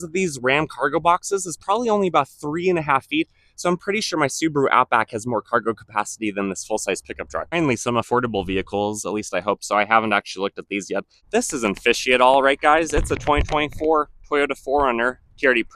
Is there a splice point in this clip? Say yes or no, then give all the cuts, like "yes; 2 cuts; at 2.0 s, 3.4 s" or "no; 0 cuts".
yes; 2 cuts; at 7.5 s, 11.2 s